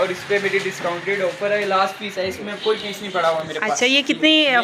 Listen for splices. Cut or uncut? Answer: uncut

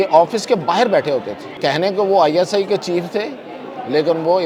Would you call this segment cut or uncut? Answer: cut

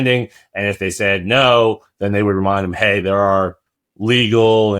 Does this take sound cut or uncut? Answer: uncut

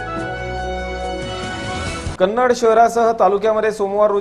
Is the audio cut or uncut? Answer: cut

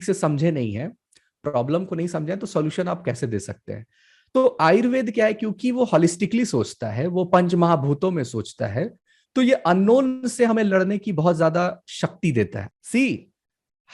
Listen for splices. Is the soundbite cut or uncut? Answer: cut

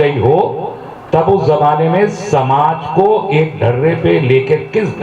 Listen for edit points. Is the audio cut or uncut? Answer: uncut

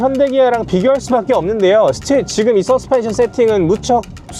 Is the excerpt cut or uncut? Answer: uncut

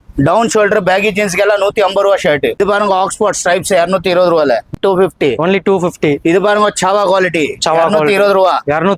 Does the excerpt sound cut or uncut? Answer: cut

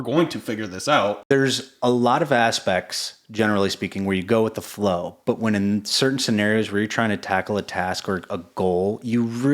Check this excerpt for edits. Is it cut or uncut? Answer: cut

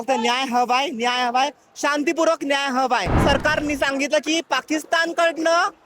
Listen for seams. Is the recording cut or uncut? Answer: cut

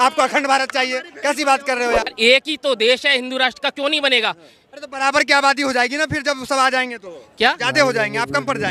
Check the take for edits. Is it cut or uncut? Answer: cut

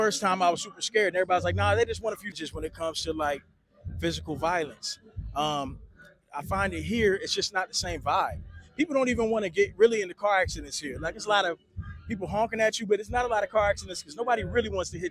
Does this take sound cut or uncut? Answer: cut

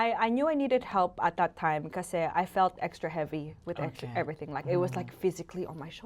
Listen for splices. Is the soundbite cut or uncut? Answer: uncut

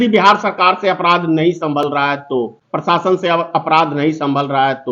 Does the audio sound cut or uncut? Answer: cut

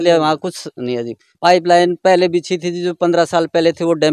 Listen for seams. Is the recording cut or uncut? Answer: cut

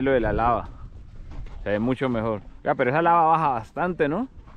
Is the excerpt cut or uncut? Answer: uncut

